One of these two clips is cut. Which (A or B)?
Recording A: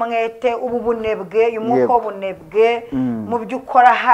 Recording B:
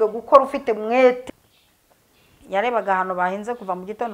B